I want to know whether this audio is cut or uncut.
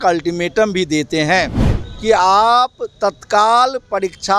uncut